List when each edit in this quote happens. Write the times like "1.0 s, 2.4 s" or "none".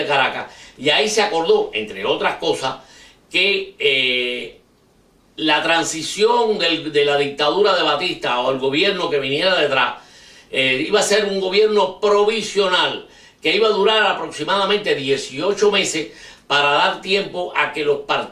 13.0 s